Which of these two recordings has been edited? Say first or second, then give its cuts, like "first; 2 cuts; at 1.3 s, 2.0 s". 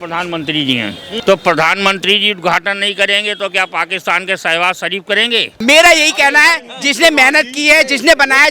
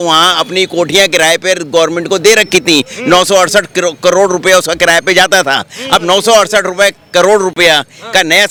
first; 2 cuts; at 1.1 s, 5.5 s